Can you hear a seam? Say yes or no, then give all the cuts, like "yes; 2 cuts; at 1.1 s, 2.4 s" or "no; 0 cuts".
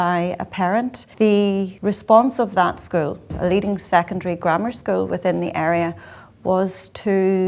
yes; 3 cuts; at 1.0 s, 1.7 s, 3.3 s